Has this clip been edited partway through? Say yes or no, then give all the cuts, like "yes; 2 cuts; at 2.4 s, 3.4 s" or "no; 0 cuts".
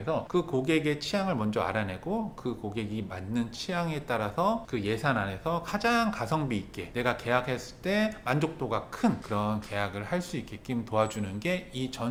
no; 0 cuts